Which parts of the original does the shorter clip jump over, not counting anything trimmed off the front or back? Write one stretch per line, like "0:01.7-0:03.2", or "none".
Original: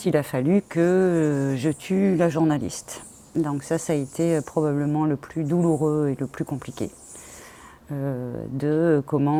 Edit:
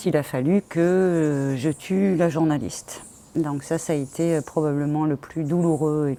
none

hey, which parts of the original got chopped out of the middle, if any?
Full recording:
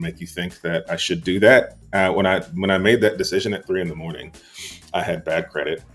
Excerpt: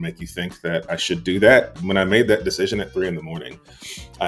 0:01.8-0:02.5

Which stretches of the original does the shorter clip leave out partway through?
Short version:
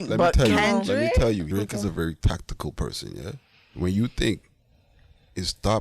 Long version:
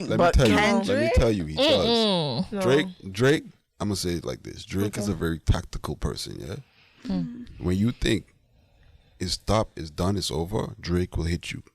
0:01.5-0:04.7
0:06.9-0:07.5

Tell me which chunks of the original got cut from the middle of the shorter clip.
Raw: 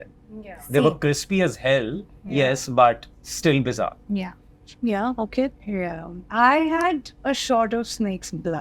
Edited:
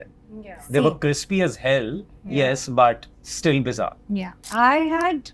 0:04.4-0:06.2

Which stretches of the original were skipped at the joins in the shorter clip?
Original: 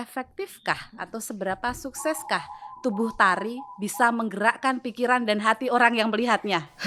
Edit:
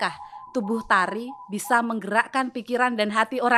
none

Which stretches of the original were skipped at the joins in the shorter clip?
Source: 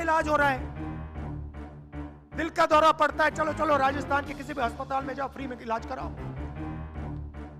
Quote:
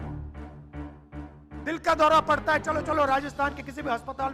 none

